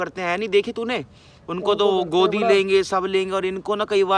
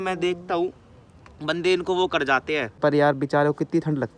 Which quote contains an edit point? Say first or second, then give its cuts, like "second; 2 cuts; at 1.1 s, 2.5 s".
second; 1 cut; at 2.7 s